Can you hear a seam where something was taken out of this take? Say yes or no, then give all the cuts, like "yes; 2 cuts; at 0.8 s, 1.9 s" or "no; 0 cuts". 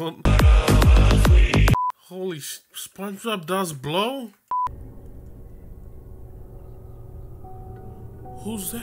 yes; 1 cut; at 4.7 s